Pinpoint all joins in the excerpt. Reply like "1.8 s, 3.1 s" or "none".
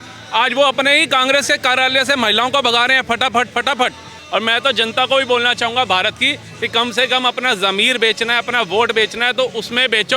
4.1 s

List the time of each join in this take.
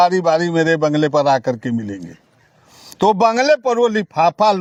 none

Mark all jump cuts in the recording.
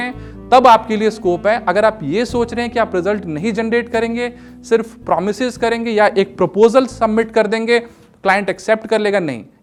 none

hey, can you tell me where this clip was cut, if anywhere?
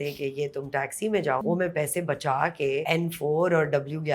1.4 s, 2.8 s

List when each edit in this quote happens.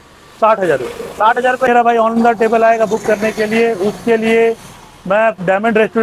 1.8 s

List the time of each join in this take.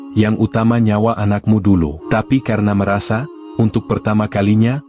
2.0 s

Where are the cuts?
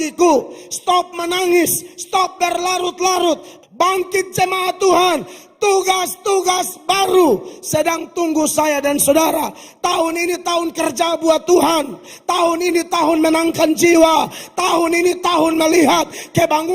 3.5 s

